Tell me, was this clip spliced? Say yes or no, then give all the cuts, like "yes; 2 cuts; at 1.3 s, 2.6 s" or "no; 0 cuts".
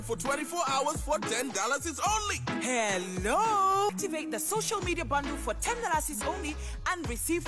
no; 0 cuts